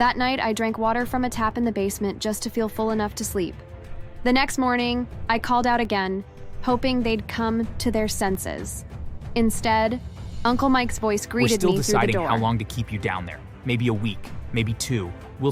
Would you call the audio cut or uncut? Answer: cut